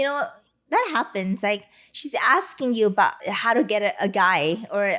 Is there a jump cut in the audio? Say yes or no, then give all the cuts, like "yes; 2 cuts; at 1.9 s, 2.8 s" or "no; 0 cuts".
yes; 1 cut; at 3.3 s